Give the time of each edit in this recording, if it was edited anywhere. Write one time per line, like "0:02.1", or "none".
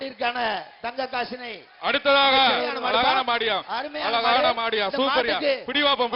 0:02.7